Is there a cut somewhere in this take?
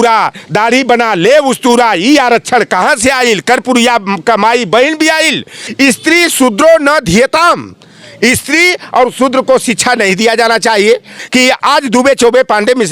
yes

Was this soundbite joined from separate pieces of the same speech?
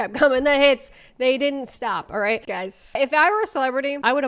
yes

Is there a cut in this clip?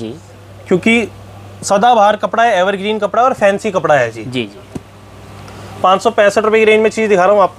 no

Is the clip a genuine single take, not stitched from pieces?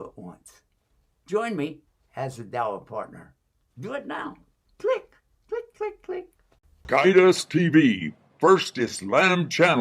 no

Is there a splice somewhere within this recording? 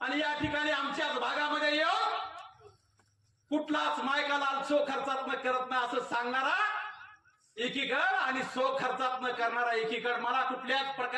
no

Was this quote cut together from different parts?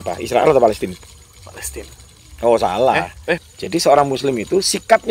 yes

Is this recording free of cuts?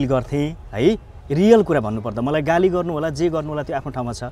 yes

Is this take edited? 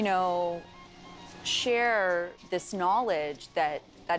no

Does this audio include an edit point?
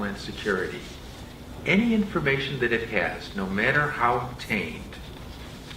yes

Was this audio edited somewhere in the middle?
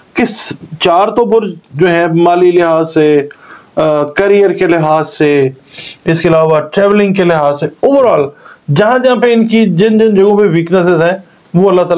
no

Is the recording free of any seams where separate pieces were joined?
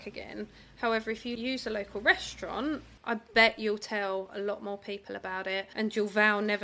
no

